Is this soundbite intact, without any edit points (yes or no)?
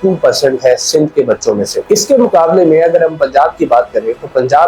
yes